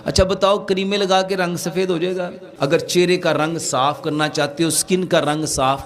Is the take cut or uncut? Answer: cut